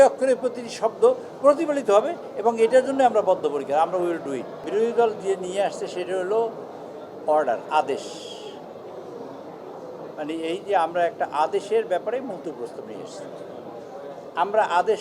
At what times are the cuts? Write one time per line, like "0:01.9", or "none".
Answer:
0:04.6

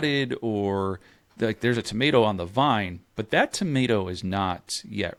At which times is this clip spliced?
none

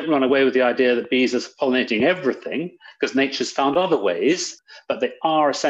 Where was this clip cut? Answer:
0:04.5

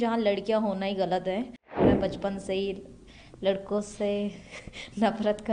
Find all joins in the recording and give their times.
0:01.8

